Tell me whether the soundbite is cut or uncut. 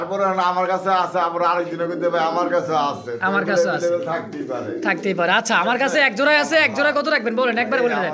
uncut